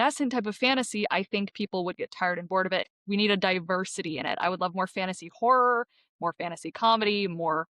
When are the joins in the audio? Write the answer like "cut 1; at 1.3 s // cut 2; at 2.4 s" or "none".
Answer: cut 1; at 2.9 s